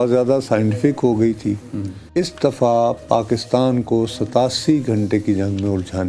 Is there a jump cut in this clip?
no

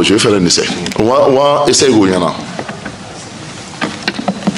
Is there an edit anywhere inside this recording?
no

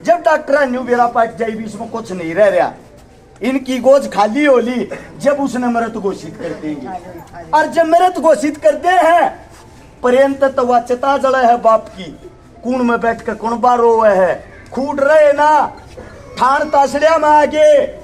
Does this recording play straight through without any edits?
yes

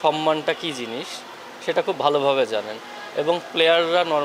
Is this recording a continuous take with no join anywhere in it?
yes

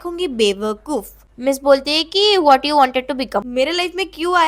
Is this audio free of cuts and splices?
no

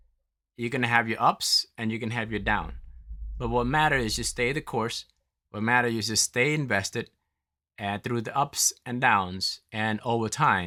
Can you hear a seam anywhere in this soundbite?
no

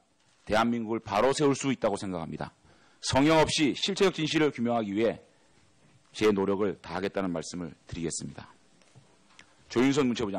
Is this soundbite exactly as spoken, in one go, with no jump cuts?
no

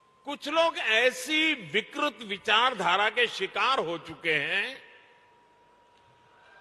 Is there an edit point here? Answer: no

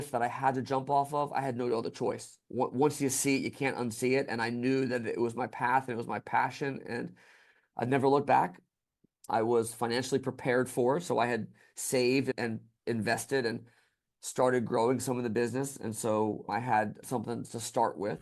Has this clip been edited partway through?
no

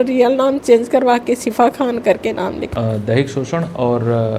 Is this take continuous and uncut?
no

